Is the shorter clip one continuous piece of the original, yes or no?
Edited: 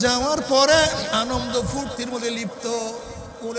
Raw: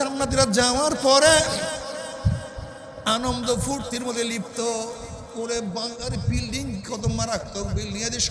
no